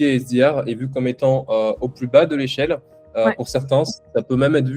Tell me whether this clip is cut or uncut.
uncut